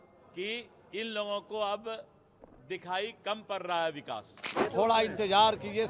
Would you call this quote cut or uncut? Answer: cut